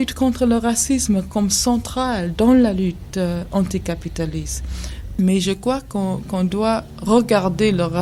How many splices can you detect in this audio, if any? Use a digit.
0